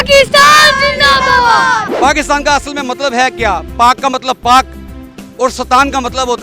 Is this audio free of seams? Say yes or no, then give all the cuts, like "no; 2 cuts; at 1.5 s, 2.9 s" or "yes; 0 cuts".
no; 1 cut; at 1.9 s